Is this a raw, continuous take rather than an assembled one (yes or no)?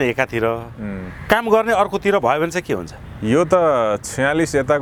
yes